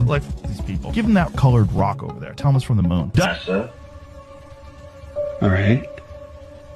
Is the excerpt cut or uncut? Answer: cut